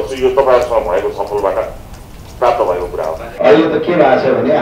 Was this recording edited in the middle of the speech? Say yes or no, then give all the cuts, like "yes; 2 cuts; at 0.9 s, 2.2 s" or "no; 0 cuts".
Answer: yes; 1 cut; at 3.3 s